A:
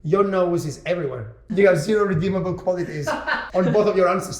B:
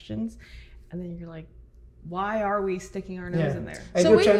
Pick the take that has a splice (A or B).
A